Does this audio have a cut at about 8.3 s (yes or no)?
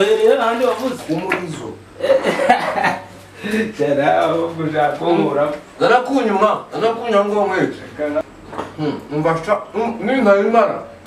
yes